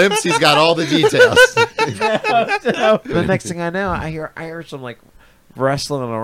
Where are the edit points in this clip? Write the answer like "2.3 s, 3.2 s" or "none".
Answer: 3.1 s